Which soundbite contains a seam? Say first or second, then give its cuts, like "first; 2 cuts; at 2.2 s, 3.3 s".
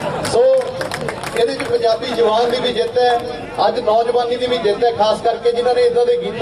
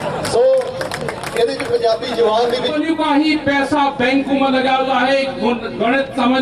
second; 1 cut; at 2.7 s